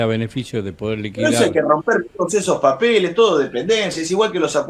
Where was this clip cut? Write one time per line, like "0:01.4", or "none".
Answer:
none